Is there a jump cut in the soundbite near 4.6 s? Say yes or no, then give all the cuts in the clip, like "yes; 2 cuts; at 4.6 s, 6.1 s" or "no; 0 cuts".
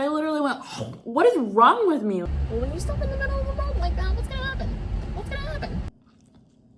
no; 2 cuts; at 2.2 s, 5.9 s